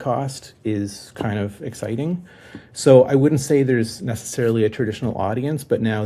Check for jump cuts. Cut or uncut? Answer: uncut